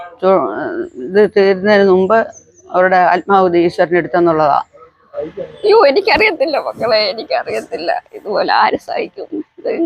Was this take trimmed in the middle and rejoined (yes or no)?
yes